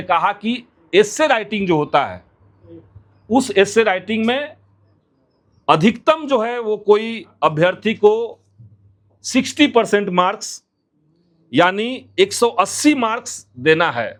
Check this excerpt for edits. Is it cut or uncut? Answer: uncut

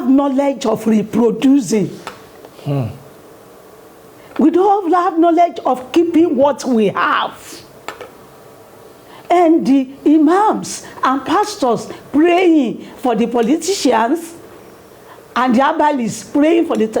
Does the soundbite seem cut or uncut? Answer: uncut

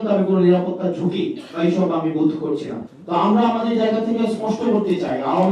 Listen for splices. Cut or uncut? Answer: cut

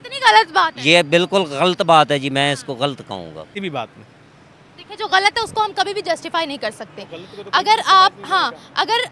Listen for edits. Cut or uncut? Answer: cut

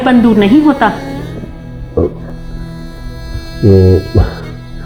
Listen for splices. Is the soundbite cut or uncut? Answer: uncut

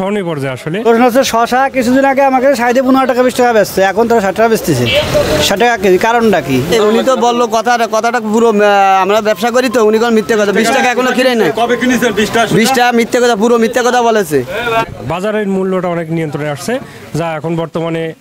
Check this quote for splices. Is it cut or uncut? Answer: cut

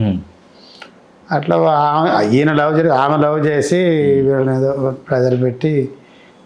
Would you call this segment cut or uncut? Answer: uncut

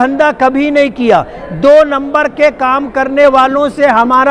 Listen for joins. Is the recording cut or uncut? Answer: uncut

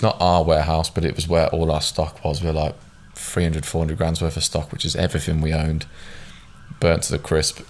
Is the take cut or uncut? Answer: uncut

